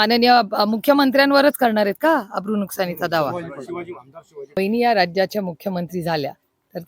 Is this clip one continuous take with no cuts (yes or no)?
no